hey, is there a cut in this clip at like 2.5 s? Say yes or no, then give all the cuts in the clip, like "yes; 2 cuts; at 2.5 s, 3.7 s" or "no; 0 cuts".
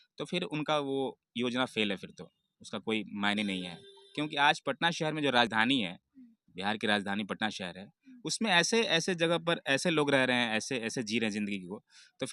no; 0 cuts